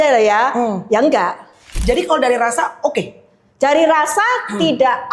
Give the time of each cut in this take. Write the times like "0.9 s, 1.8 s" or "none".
1.8 s